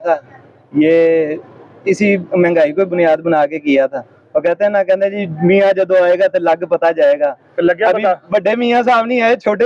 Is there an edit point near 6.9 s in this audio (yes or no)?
no